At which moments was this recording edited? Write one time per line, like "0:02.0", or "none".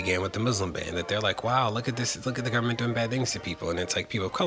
none